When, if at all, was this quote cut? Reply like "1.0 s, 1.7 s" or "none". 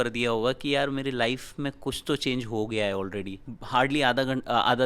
3.5 s